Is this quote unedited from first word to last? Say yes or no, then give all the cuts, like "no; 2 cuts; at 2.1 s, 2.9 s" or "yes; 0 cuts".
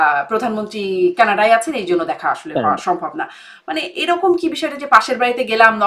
yes; 0 cuts